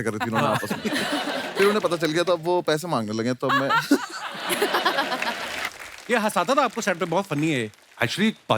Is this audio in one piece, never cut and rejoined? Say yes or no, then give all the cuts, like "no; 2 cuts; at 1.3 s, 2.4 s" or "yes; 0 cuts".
no; 1 cut; at 5.6 s